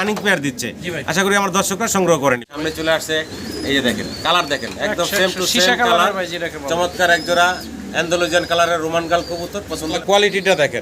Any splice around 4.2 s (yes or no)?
no